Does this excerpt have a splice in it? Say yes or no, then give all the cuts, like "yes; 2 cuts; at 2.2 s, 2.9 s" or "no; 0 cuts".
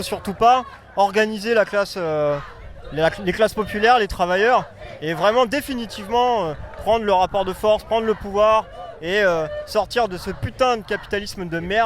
no; 0 cuts